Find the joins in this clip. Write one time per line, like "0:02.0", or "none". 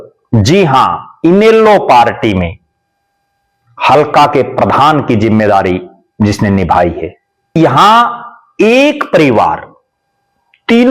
0:07.6

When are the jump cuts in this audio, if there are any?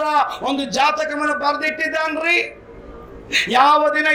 none

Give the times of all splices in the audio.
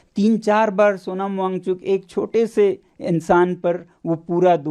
none

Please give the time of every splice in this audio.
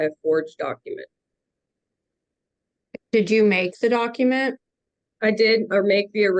0:02.3

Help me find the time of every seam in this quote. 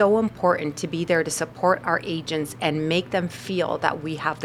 none

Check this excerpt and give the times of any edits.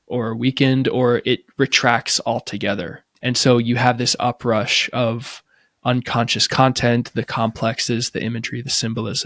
0:03.0

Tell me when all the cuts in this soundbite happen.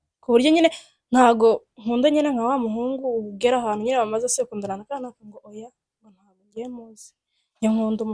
none

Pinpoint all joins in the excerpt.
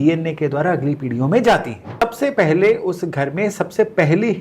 0:02.0

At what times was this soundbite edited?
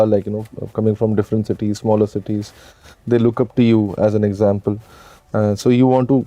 none

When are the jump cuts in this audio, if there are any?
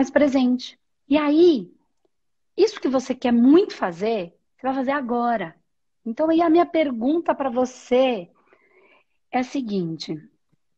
none

